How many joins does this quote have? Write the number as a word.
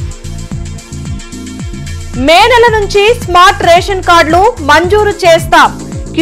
zero